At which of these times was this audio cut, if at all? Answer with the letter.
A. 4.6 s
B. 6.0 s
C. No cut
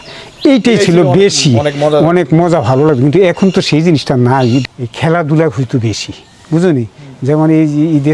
A